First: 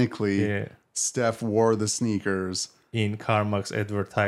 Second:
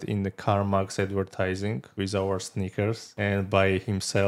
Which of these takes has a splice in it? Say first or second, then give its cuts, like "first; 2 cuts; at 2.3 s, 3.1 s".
second; 2 cuts; at 1.8 s, 3.2 s